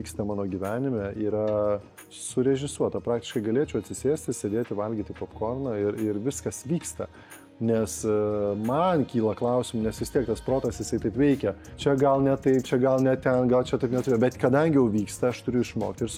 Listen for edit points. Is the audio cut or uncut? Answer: uncut